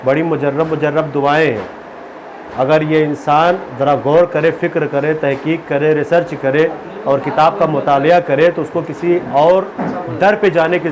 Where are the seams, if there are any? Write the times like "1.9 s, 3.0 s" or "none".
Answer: none